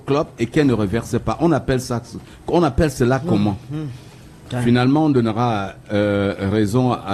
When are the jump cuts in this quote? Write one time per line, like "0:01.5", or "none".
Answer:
none